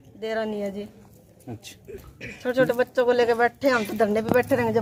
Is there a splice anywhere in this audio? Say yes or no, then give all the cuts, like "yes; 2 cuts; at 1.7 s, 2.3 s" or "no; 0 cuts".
no; 0 cuts